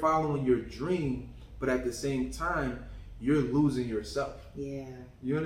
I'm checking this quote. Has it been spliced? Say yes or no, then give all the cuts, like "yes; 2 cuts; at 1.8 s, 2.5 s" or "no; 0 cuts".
no; 0 cuts